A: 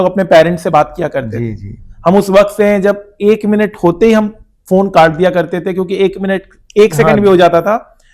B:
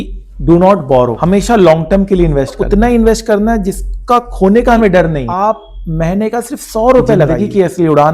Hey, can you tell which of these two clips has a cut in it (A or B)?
B